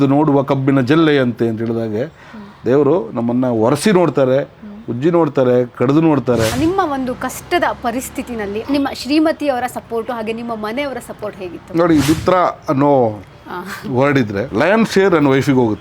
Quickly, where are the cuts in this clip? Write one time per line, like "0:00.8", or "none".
0:06.5
0:08.6
0:14.5